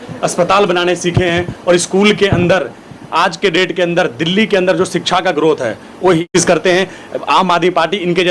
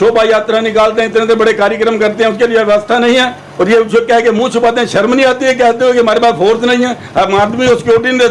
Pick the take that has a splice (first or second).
first